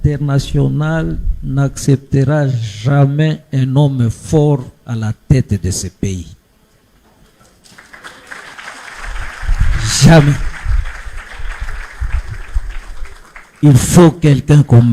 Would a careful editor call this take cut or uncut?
uncut